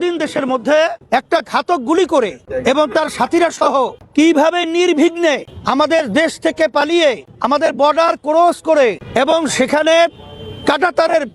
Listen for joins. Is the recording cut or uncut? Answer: cut